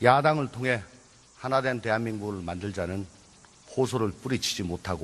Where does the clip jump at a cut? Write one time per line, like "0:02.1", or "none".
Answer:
0:02.1